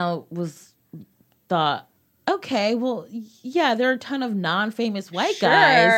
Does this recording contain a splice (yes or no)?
yes